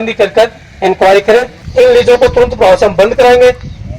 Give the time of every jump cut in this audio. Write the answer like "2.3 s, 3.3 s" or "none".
1.6 s